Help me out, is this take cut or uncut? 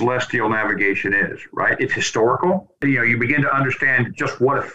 cut